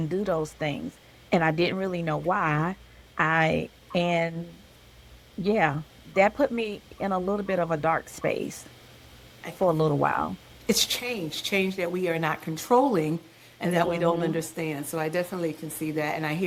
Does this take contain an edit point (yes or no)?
no